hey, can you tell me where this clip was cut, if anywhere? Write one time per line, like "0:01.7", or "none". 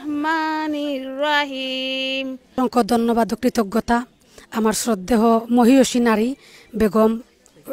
0:02.5

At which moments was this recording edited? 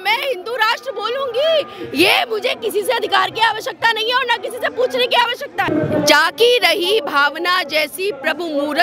0:05.7

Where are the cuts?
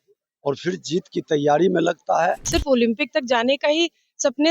0:02.5

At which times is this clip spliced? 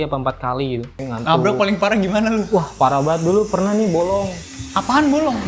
0:01.1

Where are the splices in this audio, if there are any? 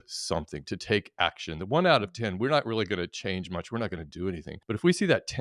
0:04.5

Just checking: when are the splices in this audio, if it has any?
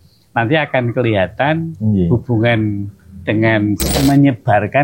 0:03.9

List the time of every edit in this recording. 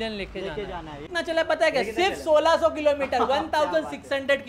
0:01.0

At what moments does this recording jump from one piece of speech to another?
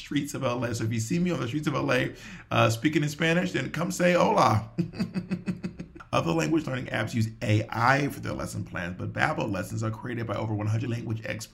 none

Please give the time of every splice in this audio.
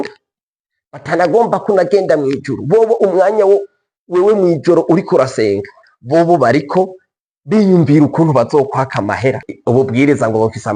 0:09.5

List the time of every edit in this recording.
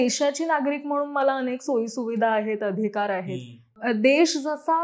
0:03.7

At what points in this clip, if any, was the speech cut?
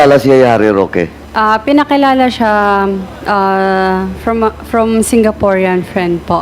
0:01.2

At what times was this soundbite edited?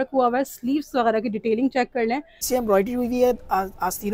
0:02.4

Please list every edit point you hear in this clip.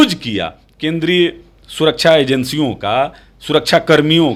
none

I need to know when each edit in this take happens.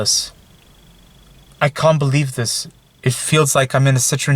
none

